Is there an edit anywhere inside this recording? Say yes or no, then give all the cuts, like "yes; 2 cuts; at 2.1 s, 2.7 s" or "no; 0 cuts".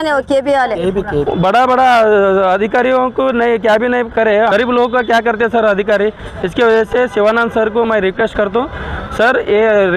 yes; 2 cuts; at 1.3 s, 4.5 s